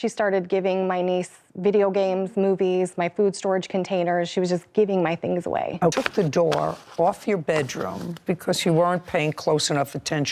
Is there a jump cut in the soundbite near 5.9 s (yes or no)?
yes